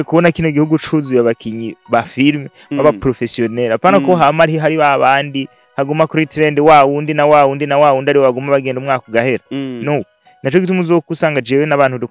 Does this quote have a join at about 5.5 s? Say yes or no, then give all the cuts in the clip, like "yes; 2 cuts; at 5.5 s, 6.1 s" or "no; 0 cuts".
no; 0 cuts